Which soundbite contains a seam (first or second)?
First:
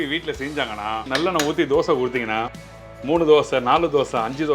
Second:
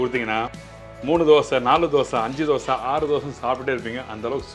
first